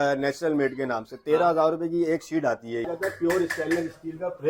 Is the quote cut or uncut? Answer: cut